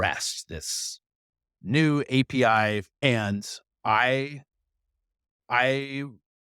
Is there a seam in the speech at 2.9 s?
yes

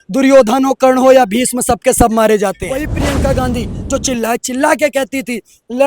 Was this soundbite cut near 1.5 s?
no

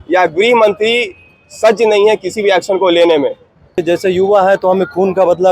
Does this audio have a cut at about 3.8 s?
yes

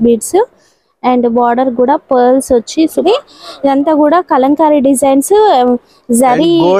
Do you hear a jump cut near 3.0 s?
yes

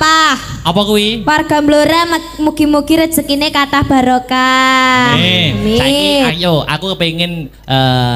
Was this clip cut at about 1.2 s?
no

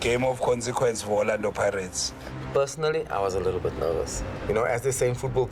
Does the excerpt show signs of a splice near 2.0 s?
yes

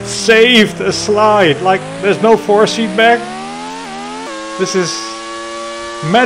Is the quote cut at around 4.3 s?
yes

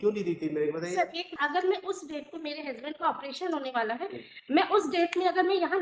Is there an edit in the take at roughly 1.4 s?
yes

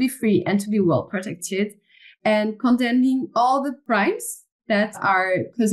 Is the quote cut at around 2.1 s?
no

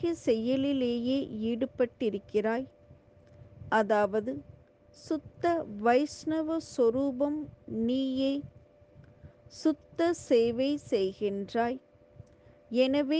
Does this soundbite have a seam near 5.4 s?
no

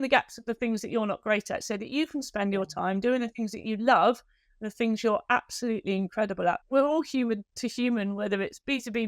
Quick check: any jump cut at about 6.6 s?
yes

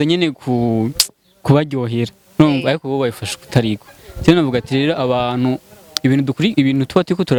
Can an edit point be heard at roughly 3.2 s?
no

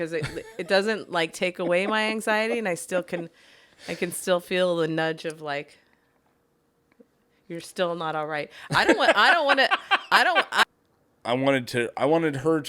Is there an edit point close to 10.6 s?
yes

